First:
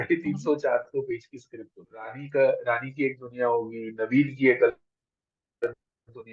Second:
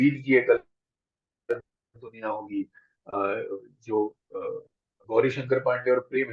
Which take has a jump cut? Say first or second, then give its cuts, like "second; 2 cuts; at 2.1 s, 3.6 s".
first; 1 cut; at 2.2 s